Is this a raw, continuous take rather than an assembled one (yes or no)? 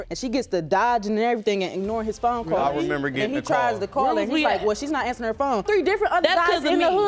no